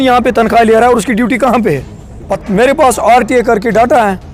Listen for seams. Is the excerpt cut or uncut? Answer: cut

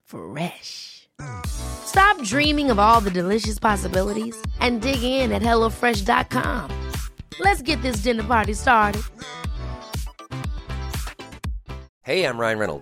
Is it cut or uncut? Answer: cut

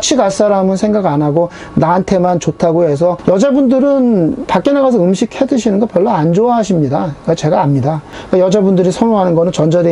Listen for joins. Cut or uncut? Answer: cut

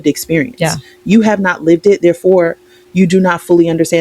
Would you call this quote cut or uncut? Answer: uncut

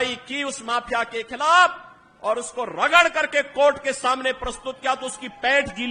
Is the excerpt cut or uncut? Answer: uncut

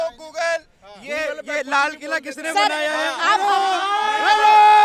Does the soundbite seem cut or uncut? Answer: uncut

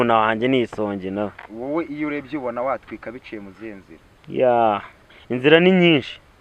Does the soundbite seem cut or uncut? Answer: uncut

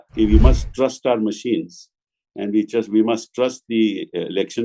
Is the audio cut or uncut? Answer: uncut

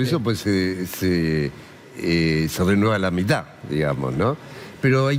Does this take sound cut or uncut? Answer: uncut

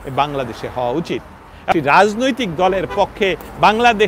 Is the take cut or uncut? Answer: cut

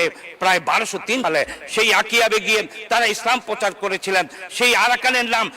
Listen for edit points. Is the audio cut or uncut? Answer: cut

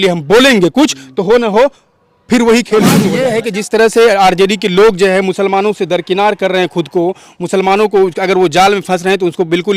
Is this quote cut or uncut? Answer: cut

